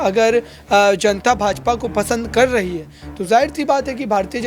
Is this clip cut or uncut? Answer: uncut